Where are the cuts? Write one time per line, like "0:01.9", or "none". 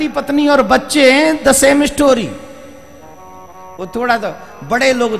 none